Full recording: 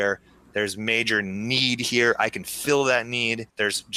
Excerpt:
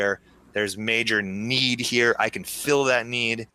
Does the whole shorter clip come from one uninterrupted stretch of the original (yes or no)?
yes